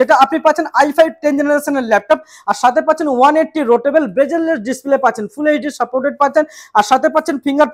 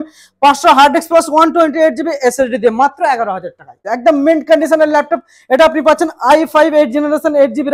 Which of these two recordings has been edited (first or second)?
second